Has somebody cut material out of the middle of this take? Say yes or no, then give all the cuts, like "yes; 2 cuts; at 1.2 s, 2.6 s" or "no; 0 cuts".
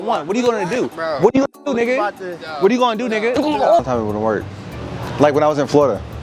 yes; 1 cut; at 3.8 s